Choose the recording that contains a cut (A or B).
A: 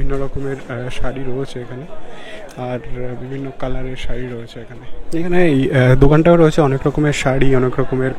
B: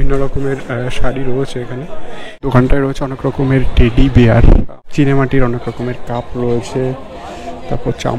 B